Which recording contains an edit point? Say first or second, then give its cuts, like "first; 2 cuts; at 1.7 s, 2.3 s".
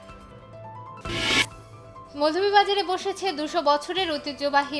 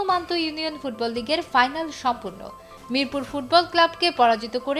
first; 1 cut; at 0.9 s